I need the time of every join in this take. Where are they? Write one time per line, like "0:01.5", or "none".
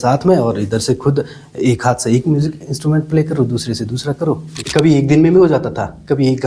0:04.5